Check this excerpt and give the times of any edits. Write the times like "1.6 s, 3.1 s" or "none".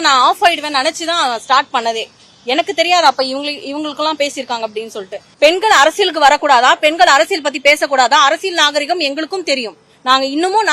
5.2 s